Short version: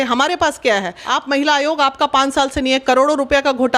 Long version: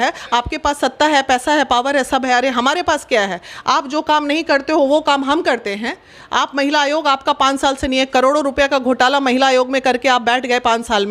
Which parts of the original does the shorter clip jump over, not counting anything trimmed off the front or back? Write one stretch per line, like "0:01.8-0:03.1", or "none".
0:03.4-0:06.2